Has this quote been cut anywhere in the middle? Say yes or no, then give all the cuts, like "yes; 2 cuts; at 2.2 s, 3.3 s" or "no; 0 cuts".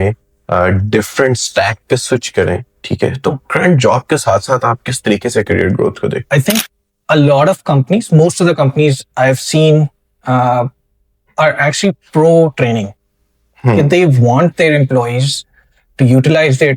yes; 1 cut; at 6.2 s